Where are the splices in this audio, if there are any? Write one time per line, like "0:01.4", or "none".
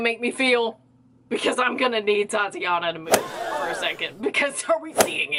none